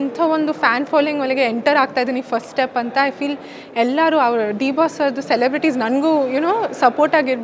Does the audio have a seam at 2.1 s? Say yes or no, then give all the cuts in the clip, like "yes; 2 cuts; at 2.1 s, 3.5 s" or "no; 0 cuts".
no; 0 cuts